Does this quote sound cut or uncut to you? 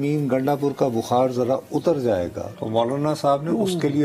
cut